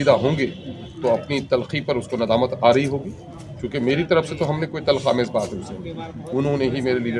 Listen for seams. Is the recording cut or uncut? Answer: uncut